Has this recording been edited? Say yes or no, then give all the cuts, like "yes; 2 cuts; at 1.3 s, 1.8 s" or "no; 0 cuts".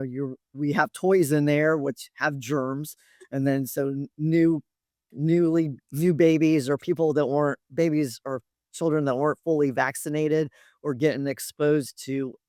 no; 0 cuts